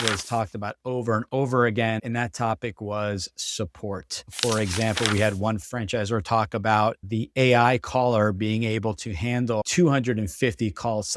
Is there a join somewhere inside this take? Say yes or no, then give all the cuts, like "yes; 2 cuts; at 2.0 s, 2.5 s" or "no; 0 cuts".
yes; 1 cut; at 4.2 s